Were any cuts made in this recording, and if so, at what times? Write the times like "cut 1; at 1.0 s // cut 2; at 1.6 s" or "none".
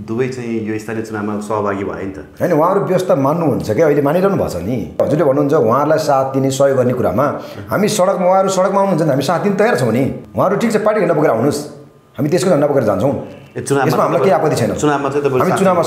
cut 1; at 5.0 s // cut 2; at 10.2 s